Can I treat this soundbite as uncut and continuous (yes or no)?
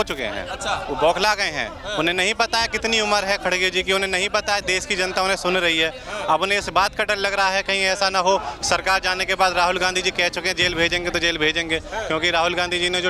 yes